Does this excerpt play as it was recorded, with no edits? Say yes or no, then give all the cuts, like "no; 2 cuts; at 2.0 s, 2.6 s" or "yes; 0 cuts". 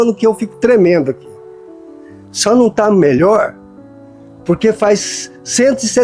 yes; 0 cuts